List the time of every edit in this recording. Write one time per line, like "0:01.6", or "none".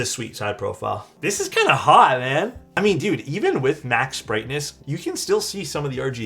0:01.1
0:02.6
0:04.7